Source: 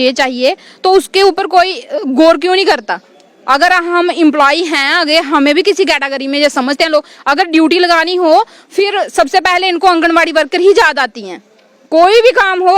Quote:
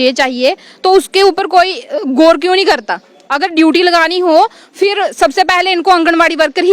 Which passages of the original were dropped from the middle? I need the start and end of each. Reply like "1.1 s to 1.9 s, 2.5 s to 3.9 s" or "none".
3.2 s to 7.2 s

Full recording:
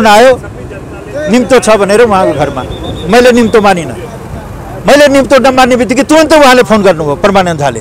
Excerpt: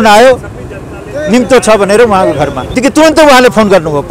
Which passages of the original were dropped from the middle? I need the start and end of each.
2.7 s to 5.9 s

